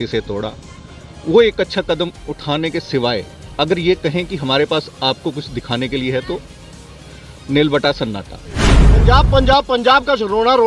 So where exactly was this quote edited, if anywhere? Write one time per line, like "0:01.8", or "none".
0:08.8